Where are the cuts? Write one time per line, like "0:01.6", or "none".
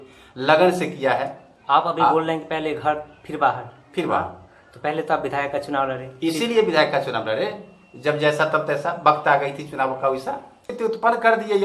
0:10.7